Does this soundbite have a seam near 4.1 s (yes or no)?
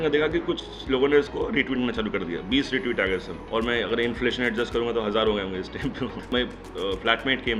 no